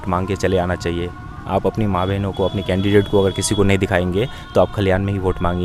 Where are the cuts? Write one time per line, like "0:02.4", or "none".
none